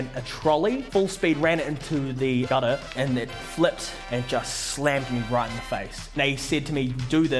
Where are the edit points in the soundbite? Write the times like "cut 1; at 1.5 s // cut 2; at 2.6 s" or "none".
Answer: cut 1; at 0.8 s // cut 2; at 2.5 s // cut 3; at 3.9 s // cut 4; at 6.2 s